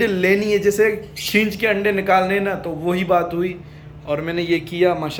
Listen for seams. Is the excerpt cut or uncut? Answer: uncut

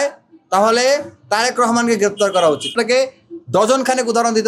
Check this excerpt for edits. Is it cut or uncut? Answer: cut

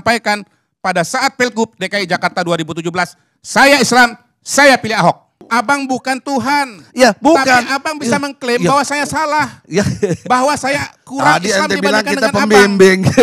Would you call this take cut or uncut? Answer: cut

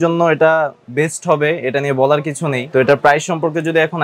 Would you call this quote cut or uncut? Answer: cut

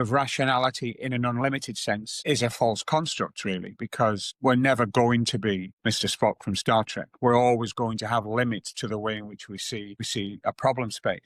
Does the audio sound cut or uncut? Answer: uncut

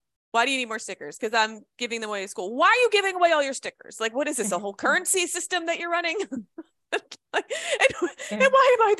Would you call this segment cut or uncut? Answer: uncut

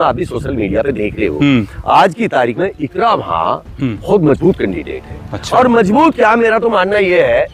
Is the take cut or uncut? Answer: uncut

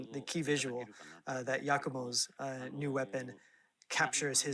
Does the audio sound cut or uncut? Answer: uncut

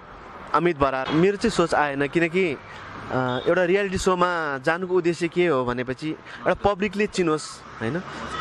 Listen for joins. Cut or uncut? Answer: cut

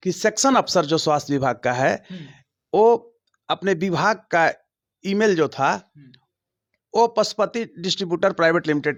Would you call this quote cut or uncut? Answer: uncut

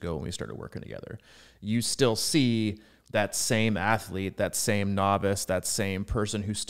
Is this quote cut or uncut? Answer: uncut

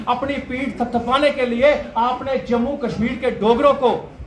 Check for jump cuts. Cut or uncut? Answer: uncut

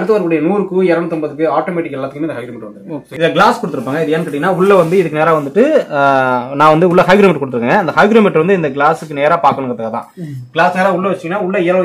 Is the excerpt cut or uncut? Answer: cut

